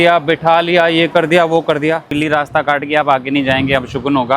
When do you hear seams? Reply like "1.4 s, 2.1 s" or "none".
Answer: 2.1 s